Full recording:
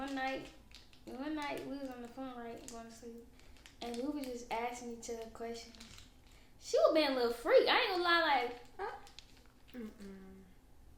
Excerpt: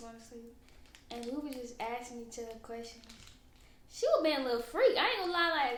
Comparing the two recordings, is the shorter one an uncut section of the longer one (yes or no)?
yes